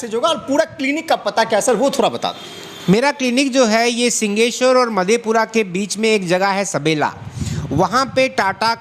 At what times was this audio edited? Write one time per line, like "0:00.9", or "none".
none